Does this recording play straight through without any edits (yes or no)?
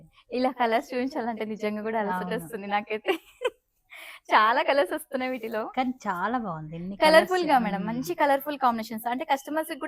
yes